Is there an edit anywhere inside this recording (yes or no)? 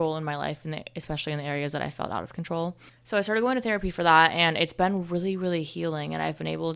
no